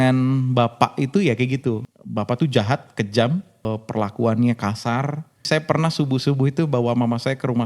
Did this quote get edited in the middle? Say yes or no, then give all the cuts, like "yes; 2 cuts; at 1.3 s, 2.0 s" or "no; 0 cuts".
yes; 3 cuts; at 1.9 s, 3.7 s, 5.4 s